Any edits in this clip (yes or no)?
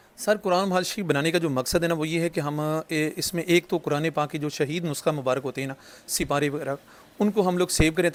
no